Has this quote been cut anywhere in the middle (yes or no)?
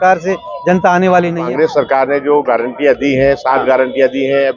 yes